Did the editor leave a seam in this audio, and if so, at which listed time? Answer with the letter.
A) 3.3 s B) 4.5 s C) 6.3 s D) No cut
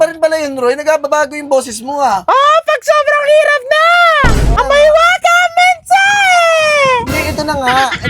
B